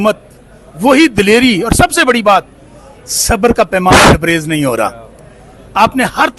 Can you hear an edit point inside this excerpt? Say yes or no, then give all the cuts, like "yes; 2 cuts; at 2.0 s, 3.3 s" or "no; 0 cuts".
no; 0 cuts